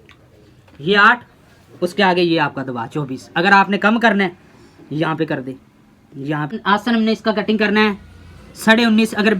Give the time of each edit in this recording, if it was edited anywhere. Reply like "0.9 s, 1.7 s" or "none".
6.5 s